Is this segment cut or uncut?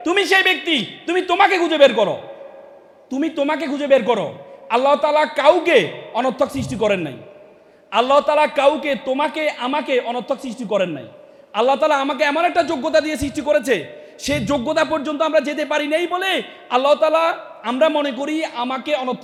uncut